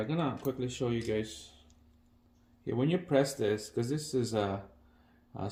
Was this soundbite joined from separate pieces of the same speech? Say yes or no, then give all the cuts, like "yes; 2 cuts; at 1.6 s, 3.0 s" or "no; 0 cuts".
no; 0 cuts